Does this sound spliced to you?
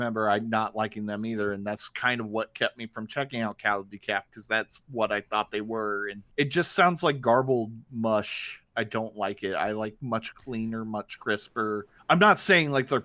yes; 3 cuts; at 6.2 s, 8.6 s, 11.9 s

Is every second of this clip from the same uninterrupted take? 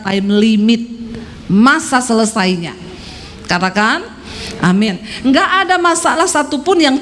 yes; 0 cuts

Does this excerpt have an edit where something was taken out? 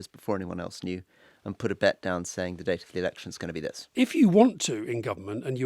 yes; 1 cut; at 3.9 s

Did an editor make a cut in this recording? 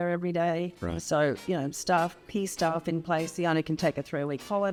no; 0 cuts

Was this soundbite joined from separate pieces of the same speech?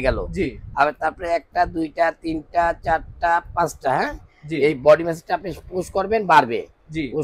no; 0 cuts

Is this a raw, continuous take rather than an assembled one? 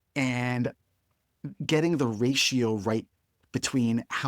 no; 1 cut; at 1.5 s

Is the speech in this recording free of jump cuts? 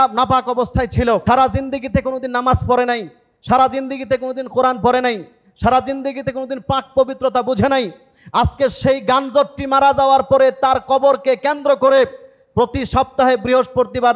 no; 1 cut; at 1.2 s

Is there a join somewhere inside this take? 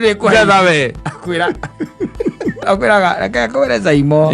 yes; 1 cut; at 2.6 s

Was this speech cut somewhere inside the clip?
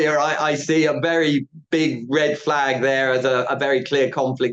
no; 0 cuts

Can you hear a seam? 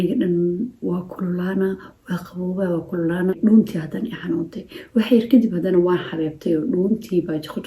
yes; 1 cut; at 3.3 s

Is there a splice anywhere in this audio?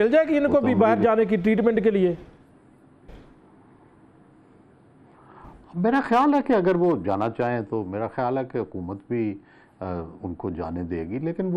no; 0 cuts

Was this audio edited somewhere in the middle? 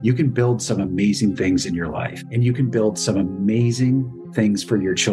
yes; 1 cut; at 4.2 s

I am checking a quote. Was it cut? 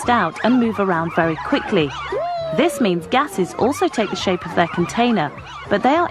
yes; 1 cut; at 2.3 s

